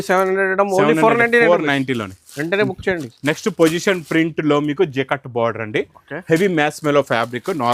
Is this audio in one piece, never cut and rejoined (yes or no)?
yes